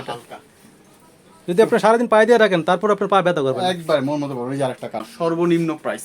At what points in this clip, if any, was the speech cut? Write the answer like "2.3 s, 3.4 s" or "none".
5.1 s